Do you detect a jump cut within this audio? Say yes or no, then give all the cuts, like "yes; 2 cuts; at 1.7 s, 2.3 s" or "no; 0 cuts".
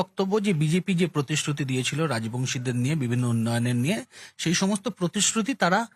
no; 0 cuts